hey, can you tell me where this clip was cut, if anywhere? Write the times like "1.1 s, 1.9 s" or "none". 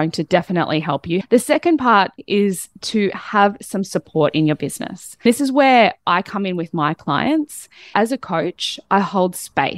1.2 s, 2.2 s, 5.3 s, 7.9 s